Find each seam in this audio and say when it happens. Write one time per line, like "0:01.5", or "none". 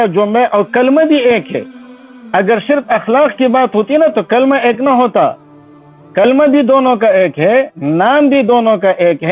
none